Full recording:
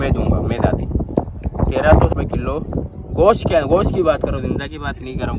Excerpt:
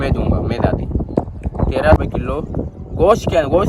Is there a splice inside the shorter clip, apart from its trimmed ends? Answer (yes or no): yes